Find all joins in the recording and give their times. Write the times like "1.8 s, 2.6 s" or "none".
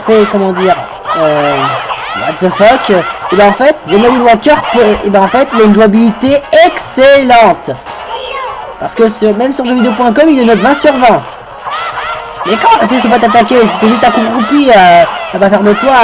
13.2 s